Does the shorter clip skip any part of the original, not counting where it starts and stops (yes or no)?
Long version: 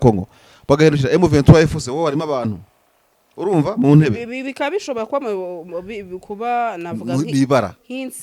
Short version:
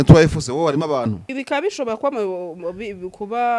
yes